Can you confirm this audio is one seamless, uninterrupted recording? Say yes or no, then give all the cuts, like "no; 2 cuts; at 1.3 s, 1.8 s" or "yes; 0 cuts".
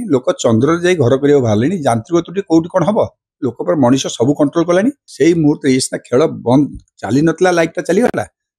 no; 1 cut; at 5.0 s